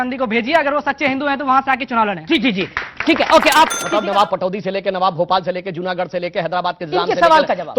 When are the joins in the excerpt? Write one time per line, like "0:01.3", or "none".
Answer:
0:03.8